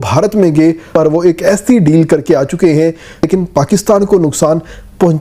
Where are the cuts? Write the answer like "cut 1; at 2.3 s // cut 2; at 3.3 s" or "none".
cut 1; at 0.9 s // cut 2; at 3.2 s